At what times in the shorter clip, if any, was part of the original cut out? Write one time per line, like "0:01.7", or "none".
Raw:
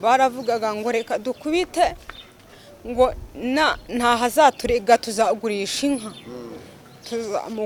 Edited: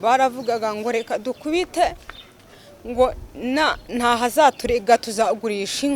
none